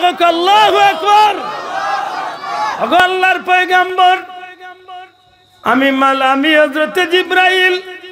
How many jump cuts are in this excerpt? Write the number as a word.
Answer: one